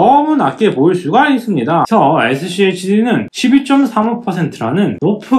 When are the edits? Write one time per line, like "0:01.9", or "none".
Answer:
0:01.9